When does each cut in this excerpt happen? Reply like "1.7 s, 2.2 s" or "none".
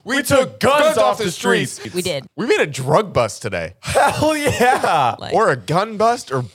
2.0 s, 5.2 s

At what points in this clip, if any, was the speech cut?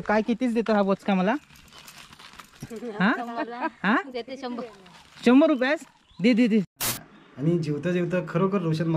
6.7 s

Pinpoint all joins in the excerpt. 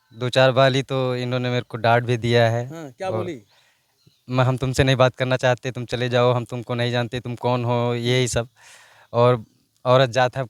none

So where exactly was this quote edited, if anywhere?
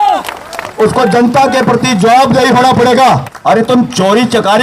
3.3 s

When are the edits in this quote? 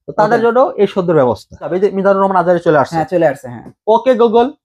1.7 s

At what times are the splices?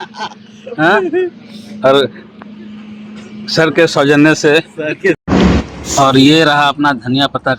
5.2 s

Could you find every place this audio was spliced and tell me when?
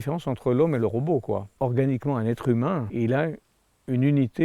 1.6 s, 2.9 s

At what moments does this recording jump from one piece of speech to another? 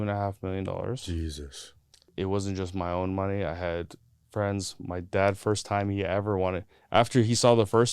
2.1 s

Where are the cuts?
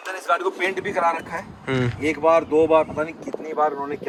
none

